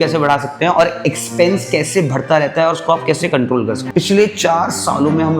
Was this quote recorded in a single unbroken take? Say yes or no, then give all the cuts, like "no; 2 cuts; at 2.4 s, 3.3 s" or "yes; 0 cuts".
no; 1 cut; at 3.8 s